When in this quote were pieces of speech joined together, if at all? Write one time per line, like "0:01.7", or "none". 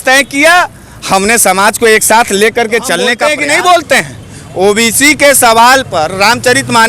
0:03.2